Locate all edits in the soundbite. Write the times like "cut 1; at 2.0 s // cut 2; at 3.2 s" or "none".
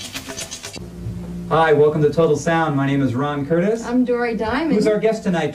none